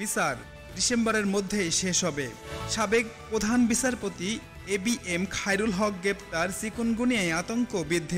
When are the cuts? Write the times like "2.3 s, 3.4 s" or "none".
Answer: 2.6 s